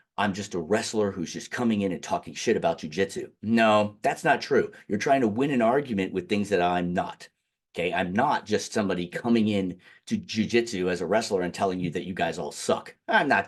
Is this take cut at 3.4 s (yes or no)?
no